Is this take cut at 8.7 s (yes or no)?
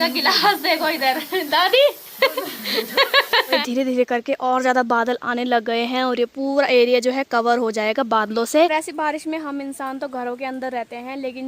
yes